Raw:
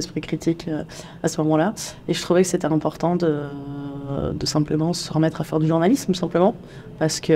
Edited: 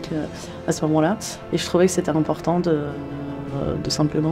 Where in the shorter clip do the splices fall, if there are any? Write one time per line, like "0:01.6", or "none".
none